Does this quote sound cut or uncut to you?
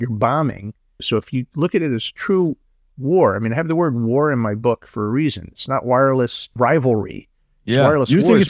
cut